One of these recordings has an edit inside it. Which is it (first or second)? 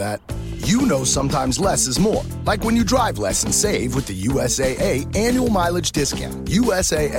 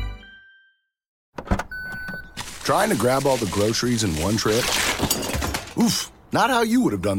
second